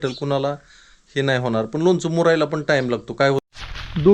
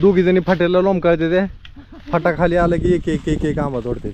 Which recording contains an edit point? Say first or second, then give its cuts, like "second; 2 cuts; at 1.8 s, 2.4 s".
first; 1 cut; at 3.1 s